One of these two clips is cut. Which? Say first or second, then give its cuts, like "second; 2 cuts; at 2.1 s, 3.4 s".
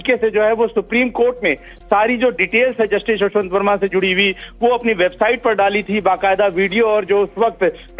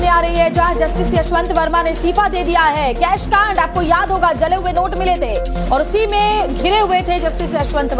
first; 1 cut; at 3.3 s